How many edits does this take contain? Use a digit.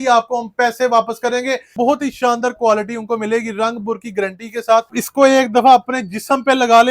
2